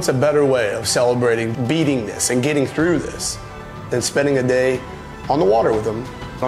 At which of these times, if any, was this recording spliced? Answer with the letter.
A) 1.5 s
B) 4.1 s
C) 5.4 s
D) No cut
A